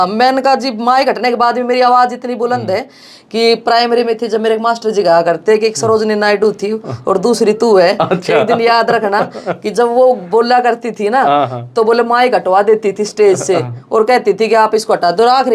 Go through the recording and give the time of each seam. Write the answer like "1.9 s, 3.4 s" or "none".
none